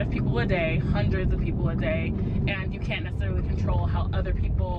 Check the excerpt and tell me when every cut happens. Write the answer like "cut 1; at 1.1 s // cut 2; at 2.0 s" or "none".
none